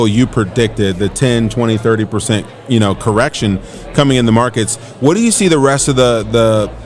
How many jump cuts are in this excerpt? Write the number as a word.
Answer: zero